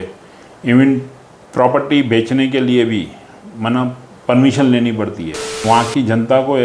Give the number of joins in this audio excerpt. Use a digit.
1